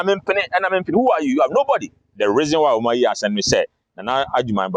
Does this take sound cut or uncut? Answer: cut